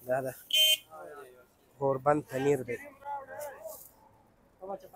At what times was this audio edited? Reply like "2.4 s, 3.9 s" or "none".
none

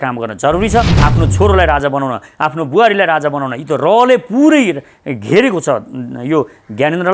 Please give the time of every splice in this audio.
1.0 s

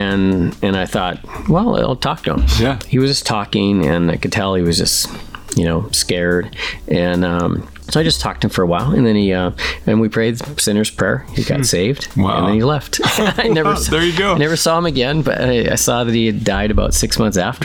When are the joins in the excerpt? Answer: 2.8 s, 7.8 s

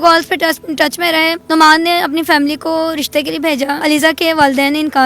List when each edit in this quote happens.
1.4 s, 3.8 s

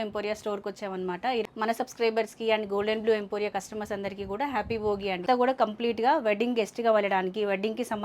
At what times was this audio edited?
1.4 s, 5.2 s

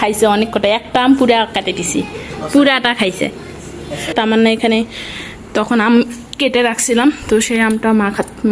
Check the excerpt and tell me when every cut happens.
4.1 s

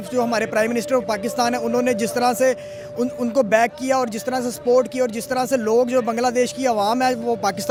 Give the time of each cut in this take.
none

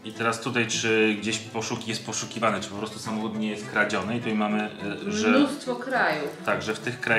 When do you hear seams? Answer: none

